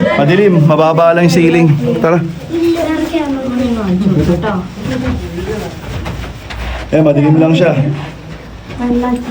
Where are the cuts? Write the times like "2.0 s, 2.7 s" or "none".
none

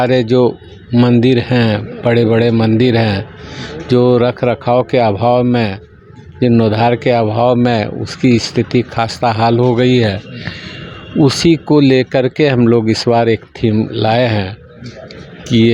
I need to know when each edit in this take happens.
none

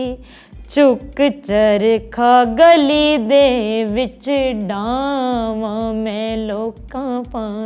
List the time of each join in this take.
none

